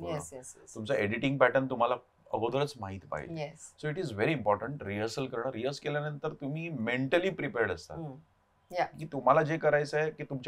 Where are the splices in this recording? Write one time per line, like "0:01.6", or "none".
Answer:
none

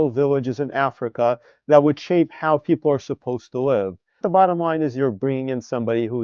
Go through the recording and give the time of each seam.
0:04.2

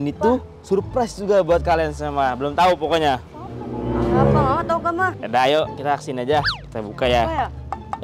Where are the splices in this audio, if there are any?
0:05.1
0:06.5

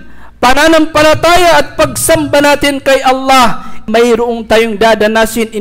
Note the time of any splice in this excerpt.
0:03.8

